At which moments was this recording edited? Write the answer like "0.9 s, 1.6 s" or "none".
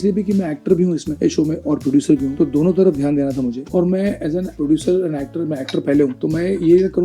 none